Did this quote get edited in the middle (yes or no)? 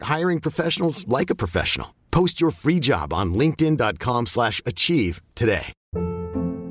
no